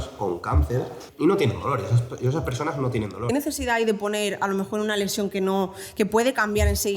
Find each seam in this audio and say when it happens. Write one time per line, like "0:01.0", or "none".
0:01.0
0:03.3